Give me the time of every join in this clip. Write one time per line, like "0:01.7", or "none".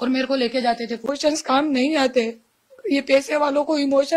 0:01.1